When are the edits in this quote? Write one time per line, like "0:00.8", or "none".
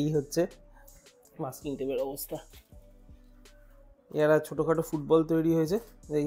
0:02.5
0:04.0